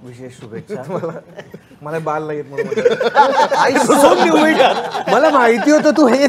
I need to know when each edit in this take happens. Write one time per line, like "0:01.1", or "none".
none